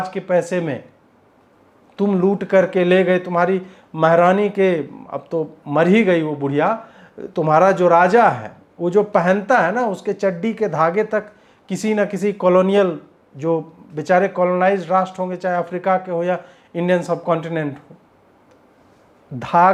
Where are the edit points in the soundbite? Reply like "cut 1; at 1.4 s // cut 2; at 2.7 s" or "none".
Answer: none